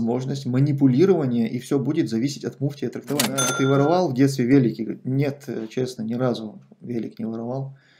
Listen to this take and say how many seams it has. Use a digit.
1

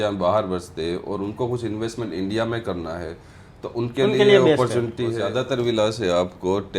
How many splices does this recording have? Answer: 1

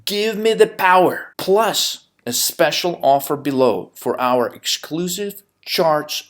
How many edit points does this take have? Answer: 1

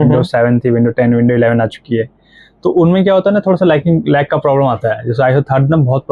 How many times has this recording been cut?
0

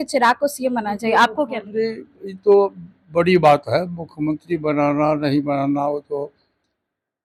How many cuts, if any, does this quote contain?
0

